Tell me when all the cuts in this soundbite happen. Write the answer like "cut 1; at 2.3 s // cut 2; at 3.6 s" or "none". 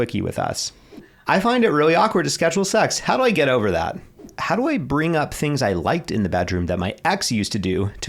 cut 1; at 1.1 s // cut 2; at 4.3 s